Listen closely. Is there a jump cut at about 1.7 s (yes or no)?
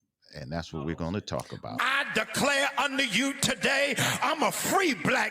yes